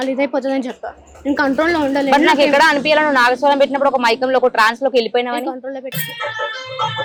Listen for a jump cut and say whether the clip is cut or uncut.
uncut